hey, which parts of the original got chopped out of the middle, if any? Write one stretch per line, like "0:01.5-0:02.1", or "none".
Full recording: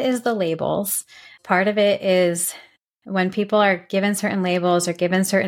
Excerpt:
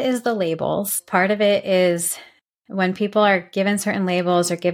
0:01.0-0:01.3